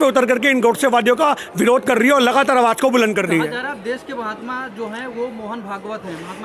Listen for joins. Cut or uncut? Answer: uncut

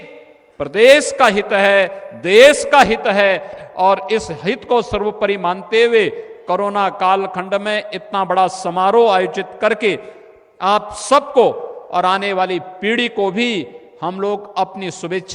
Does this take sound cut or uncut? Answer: uncut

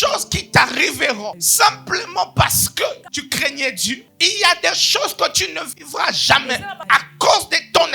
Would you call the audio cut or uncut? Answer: cut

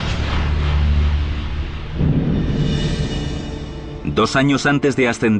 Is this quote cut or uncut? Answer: cut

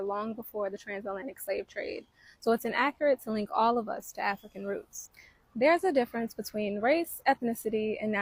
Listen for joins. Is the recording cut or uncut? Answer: uncut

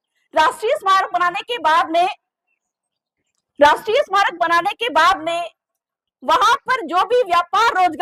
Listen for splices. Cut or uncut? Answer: uncut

